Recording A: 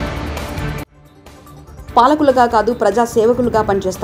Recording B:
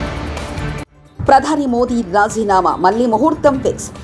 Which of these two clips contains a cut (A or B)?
A